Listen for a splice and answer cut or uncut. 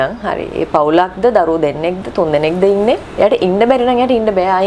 uncut